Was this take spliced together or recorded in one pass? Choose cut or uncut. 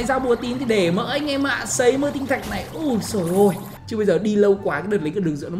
cut